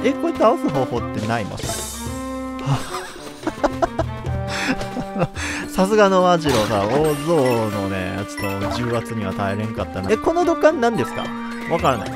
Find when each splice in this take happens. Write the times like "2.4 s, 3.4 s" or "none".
10.0 s